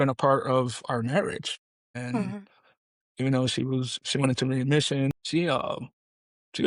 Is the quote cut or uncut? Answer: uncut